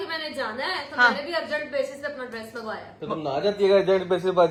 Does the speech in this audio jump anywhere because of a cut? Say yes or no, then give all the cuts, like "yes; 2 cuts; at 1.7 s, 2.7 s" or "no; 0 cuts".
no; 0 cuts